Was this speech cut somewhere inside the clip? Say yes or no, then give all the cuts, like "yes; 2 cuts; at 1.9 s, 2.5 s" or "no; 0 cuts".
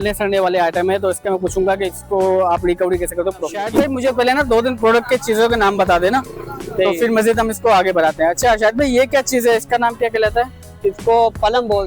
yes; 1 cut; at 3.7 s